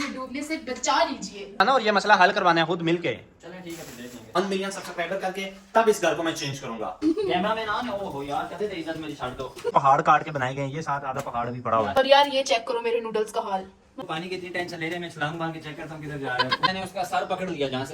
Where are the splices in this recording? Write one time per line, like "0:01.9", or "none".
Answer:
0:01.6
0:04.3
0:07.0
0:09.7
0:11.9
0:14.0
0:16.7